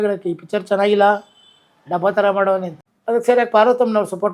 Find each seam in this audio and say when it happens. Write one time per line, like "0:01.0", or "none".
0:02.8